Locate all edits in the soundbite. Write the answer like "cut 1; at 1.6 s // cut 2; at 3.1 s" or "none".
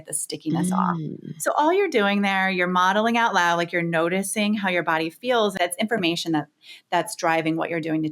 cut 1; at 5.5 s